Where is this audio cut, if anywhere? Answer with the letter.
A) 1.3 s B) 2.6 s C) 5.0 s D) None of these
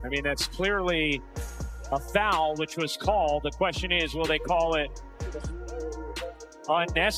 D